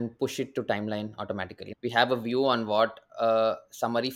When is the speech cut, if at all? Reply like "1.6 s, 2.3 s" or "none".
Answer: none

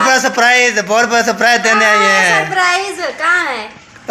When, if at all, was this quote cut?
none

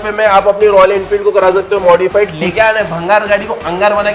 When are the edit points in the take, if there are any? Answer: none

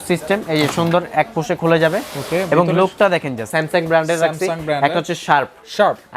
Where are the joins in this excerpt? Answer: 3.4 s

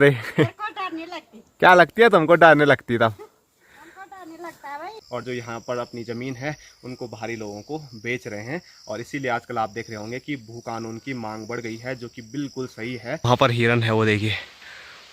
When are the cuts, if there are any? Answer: 5.0 s, 13.3 s

